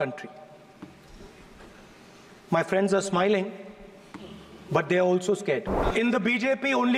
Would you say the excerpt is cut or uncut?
cut